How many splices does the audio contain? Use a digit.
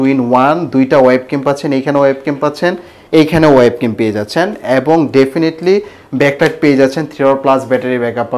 0